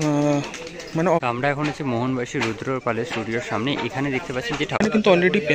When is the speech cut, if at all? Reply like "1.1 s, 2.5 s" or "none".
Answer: 1.2 s, 4.8 s